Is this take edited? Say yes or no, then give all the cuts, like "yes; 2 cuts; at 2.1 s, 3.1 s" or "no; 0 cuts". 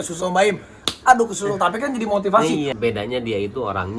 yes; 1 cut; at 2.7 s